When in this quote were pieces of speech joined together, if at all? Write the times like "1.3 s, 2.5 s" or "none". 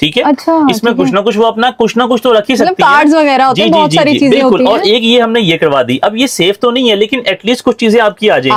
none